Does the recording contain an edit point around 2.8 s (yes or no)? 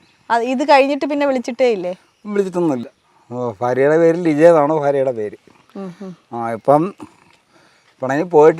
yes